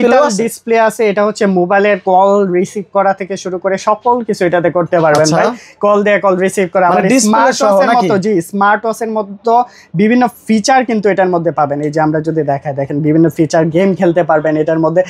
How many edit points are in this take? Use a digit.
0